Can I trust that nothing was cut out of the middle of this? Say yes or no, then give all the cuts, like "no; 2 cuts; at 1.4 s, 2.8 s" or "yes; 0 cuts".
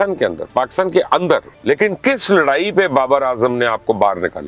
no; 1 cut; at 1.5 s